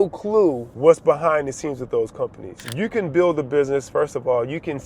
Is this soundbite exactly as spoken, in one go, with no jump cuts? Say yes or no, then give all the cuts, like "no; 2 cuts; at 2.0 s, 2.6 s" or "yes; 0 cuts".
no; 1 cut; at 2.6 s